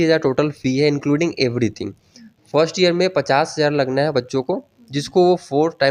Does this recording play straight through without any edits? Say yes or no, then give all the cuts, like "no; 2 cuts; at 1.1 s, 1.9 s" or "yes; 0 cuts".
yes; 0 cuts